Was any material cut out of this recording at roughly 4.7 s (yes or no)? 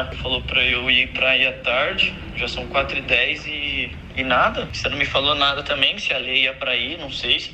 no